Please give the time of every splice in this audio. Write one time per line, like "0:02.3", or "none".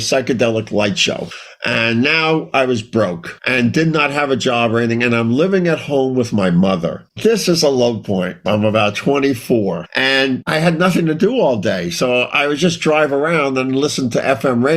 none